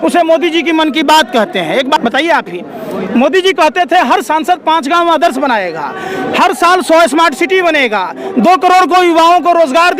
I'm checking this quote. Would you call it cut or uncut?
cut